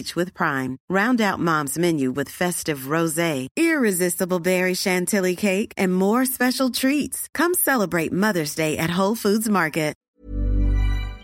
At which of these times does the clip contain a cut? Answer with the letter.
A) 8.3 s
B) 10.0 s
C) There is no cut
B